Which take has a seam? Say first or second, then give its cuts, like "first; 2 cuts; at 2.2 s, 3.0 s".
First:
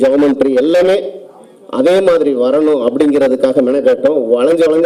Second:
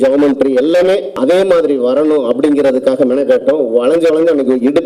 second; 1 cut; at 1.1 s